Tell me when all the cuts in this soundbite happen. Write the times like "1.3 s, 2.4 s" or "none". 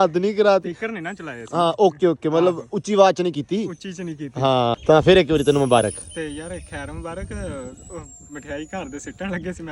4.8 s

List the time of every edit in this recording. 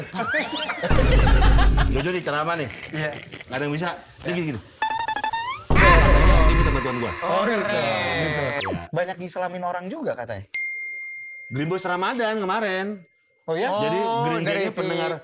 8.6 s

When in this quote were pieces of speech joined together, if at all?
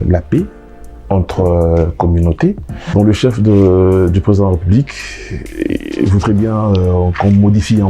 2.9 s

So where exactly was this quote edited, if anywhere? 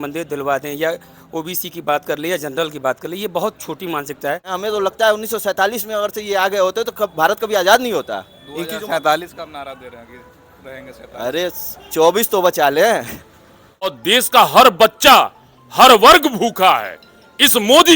4.5 s, 13.9 s

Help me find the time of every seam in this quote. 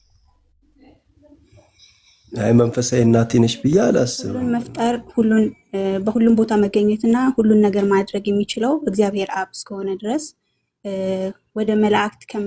4.5 s

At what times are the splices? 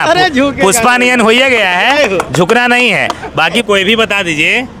3.6 s

